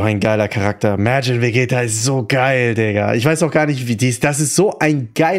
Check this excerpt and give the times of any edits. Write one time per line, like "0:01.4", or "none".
none